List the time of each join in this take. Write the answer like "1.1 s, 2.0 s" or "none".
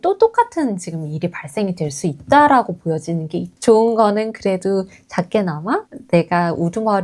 3.4 s